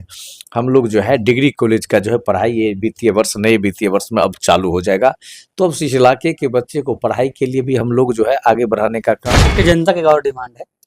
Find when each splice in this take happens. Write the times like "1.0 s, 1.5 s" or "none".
9.4 s